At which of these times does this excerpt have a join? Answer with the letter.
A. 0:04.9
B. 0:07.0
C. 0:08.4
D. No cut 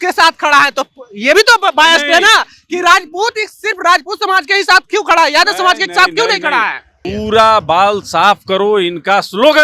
B